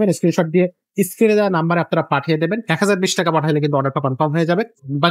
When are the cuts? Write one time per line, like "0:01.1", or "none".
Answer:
none